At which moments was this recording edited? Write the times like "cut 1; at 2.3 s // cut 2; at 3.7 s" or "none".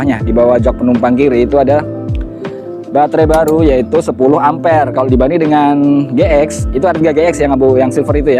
none